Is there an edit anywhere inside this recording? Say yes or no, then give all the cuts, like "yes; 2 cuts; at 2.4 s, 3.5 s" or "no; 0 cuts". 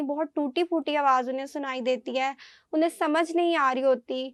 no; 0 cuts